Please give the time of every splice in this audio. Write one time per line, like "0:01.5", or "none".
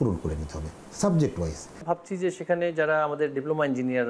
0:01.7